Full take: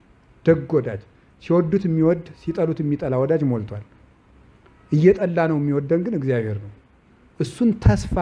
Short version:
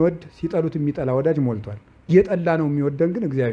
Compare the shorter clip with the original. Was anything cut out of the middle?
yes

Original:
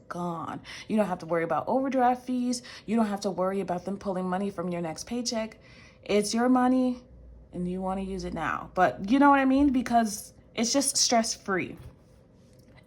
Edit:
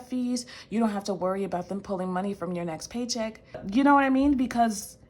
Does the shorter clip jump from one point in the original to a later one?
yes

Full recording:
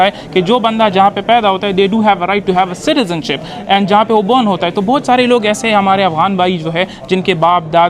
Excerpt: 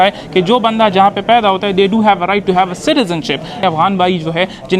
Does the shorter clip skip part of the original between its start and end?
yes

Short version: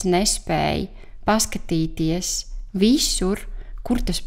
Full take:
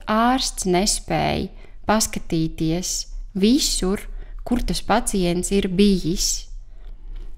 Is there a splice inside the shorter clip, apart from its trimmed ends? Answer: no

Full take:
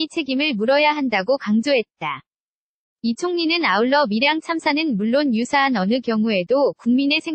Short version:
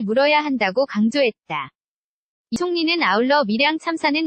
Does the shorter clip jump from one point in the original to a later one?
yes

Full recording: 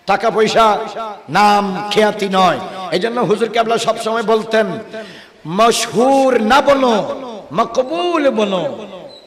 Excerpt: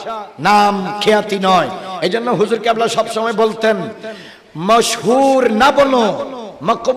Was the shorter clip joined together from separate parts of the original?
no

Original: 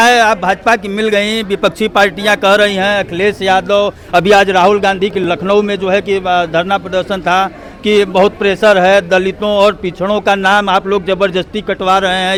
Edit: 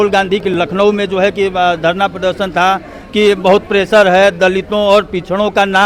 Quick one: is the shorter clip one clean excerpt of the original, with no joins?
yes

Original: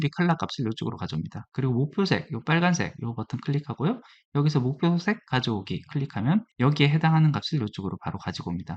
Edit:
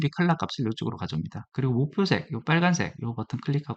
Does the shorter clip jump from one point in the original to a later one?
no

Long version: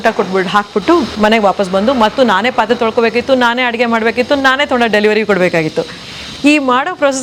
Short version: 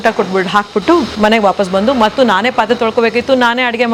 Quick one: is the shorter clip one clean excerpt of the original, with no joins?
yes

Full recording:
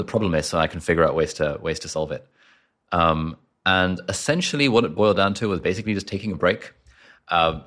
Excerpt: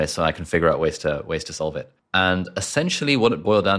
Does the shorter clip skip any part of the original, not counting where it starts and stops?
yes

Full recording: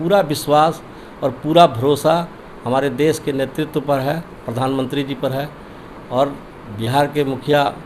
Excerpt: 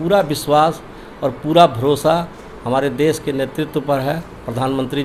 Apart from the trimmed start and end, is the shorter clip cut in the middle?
no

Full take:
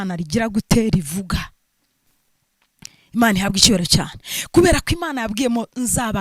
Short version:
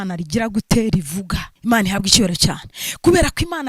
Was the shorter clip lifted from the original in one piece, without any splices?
no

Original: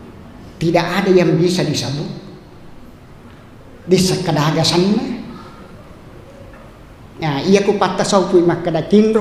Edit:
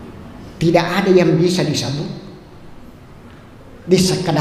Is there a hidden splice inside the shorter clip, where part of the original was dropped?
no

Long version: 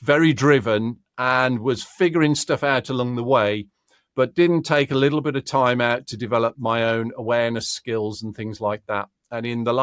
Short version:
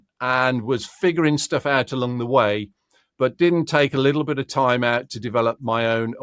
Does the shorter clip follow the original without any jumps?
yes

